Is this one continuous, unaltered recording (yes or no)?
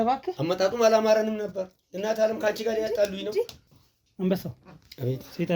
no